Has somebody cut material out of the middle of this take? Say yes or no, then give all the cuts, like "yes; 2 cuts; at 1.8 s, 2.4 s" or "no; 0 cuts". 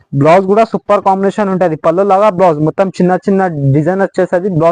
no; 0 cuts